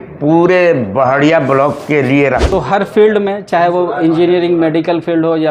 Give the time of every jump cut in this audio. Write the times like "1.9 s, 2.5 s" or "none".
2.4 s